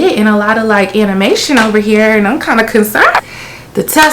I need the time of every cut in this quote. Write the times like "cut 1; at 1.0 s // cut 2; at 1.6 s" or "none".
cut 1; at 3.2 s